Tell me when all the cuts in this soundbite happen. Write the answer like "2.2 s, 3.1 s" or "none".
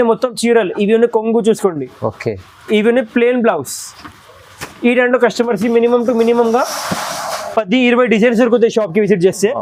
none